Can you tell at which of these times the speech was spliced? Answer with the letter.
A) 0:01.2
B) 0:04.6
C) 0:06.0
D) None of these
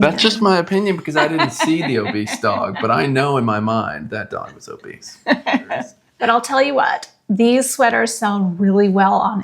C